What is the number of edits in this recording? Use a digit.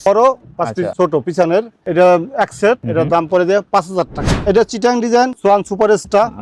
2